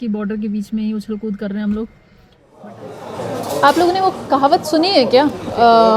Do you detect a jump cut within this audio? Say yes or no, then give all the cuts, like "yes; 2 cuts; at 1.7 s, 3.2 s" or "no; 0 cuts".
yes; 1 cut; at 2.7 s